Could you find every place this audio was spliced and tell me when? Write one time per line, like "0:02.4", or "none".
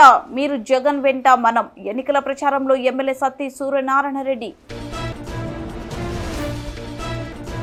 none